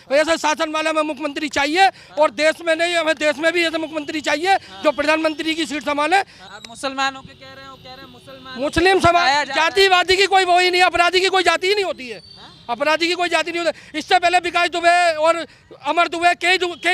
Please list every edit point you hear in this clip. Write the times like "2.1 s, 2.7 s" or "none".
6.4 s